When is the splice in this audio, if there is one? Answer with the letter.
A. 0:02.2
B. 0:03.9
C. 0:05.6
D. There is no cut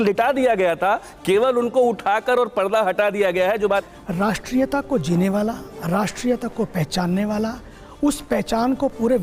B